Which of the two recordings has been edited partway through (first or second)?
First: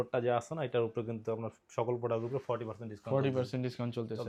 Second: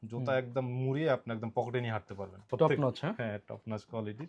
second